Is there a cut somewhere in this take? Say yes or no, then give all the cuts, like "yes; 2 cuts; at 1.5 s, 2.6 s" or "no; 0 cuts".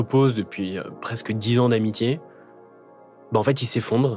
no; 0 cuts